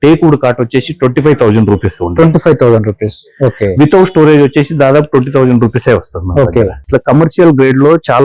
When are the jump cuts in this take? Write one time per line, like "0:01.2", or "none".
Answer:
0:06.8